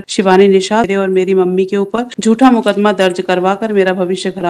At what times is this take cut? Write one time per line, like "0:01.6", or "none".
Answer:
0:00.9
0:02.1